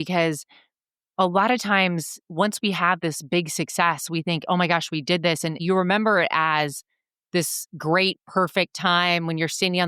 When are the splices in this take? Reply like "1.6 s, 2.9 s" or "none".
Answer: 3.0 s, 5.5 s

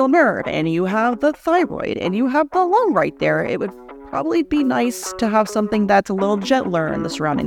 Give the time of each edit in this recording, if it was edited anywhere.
none

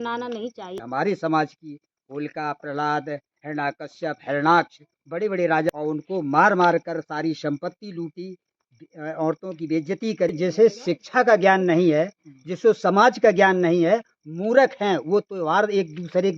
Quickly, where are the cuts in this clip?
0.8 s, 5.7 s, 10.3 s

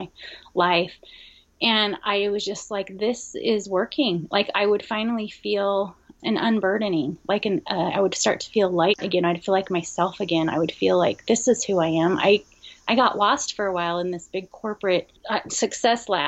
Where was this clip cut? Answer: none

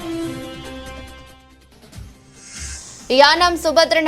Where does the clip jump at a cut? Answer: 2.7 s

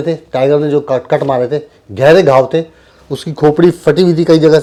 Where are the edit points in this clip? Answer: none

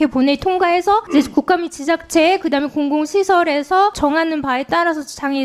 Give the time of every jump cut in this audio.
1.1 s, 4.0 s

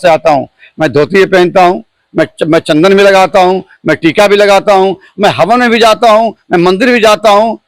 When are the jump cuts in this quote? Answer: none

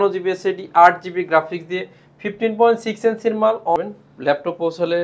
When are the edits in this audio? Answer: 3.8 s

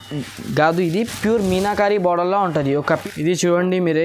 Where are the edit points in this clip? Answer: 2.8 s

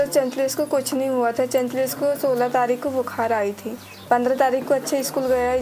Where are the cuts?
none

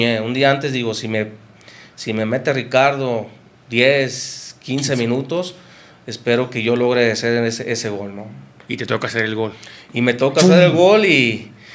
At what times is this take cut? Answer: none

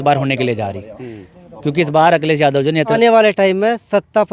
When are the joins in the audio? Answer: 2.9 s

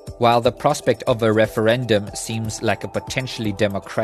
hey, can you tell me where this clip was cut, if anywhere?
none

